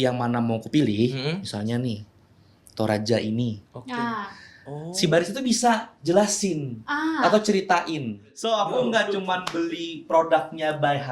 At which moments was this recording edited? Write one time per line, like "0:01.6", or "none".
0:08.3